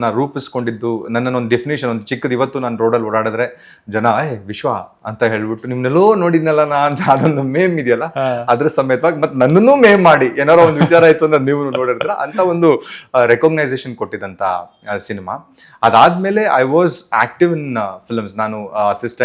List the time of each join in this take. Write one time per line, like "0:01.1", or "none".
none